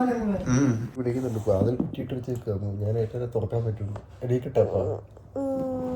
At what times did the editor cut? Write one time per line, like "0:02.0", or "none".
0:01.0

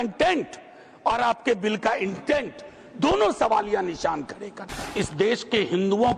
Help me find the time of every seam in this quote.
0:04.8

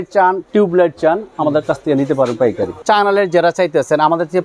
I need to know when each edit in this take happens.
0:02.7

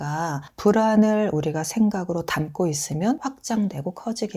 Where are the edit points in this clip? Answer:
0:03.2

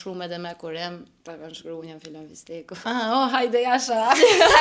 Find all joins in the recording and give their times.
0:01.1
0:02.8

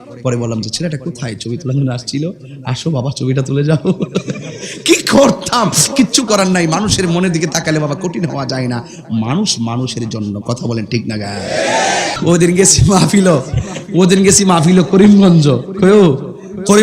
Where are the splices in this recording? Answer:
0:12.2

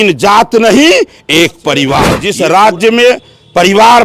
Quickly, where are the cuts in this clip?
0:02.2

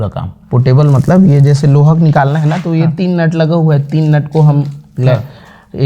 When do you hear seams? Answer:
none

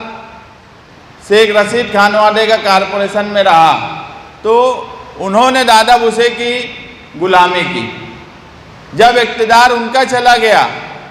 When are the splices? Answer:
none

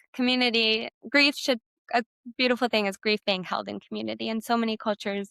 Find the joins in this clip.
0:00.9
0:01.7

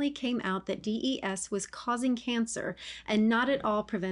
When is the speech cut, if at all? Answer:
none

